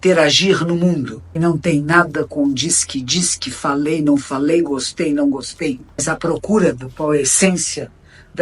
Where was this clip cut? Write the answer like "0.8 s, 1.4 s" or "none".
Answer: 1.2 s, 6.0 s